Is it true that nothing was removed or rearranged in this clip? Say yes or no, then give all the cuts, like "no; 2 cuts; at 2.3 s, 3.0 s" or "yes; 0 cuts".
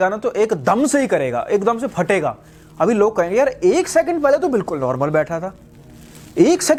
yes; 0 cuts